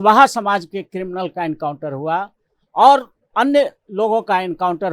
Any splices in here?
no; 0 cuts

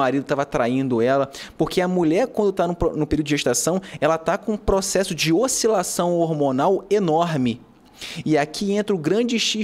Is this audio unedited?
yes; 0 cuts

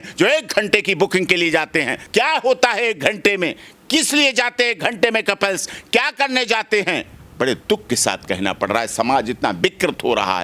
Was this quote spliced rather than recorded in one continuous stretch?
yes; 1 cut; at 2.0 s

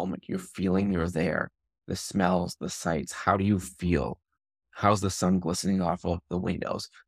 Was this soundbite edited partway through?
no; 0 cuts

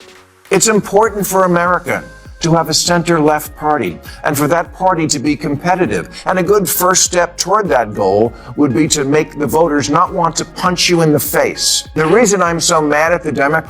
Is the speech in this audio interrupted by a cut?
yes; 1 cut; at 11.7 s

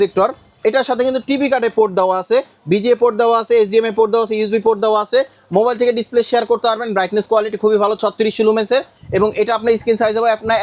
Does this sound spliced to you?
no; 0 cuts

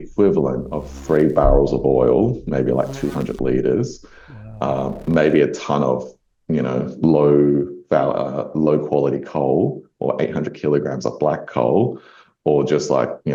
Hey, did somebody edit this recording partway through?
no; 0 cuts

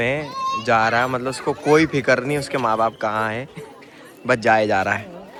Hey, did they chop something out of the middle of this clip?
no; 0 cuts

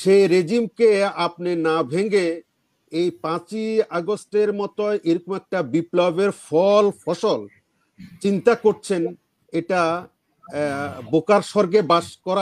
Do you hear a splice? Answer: no; 0 cuts

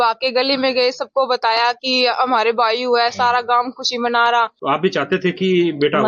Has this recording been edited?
yes; 1 cut; at 4.6 s

